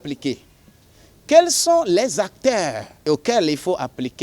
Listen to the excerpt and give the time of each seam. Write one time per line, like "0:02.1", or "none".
0:03.1

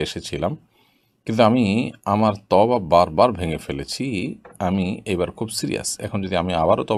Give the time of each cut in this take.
none

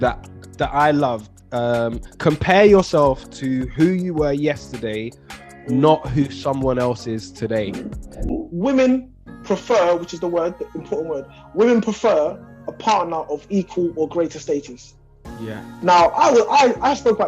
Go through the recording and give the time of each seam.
0:08.3

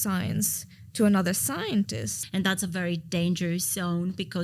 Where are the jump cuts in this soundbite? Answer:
0:02.1

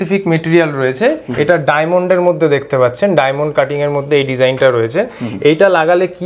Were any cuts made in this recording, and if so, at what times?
none

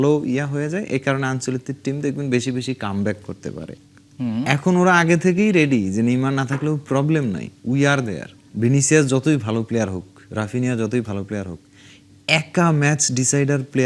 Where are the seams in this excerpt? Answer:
0:03.7
0:08.5

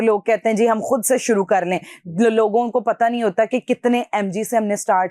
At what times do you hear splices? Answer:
none

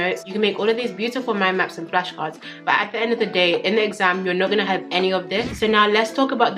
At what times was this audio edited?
0:05.5

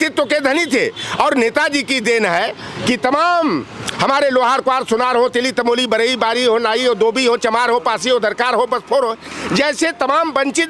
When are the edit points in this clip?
none

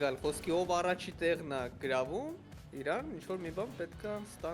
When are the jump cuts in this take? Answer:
none

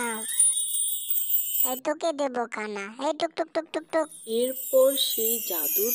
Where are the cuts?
0:01.5

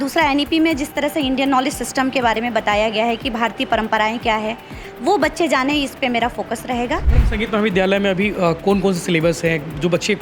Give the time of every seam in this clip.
0:07.1

